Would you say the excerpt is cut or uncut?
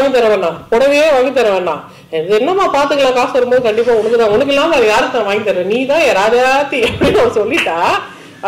uncut